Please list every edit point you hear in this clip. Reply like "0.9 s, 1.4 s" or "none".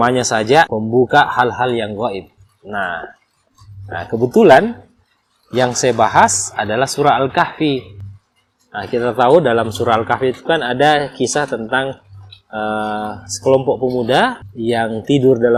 none